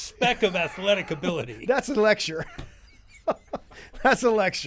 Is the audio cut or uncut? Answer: uncut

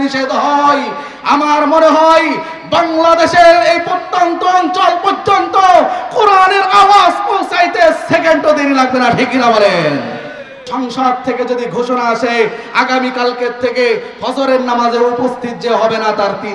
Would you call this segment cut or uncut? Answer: cut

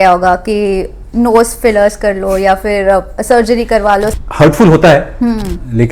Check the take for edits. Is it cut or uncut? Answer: cut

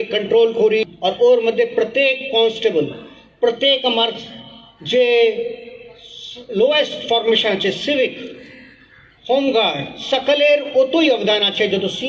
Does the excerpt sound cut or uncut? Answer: cut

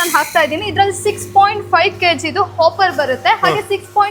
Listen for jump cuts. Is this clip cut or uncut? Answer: uncut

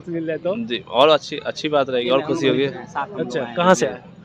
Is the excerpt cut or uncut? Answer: uncut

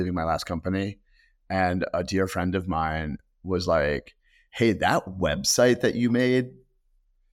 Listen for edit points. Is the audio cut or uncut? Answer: uncut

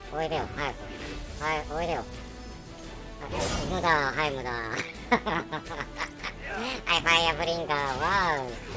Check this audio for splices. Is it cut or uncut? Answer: uncut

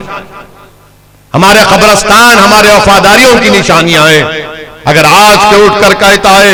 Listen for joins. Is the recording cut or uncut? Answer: uncut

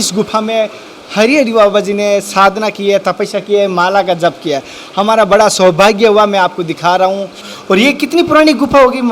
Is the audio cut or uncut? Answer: cut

